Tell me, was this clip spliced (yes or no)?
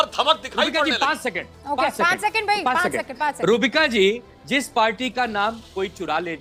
no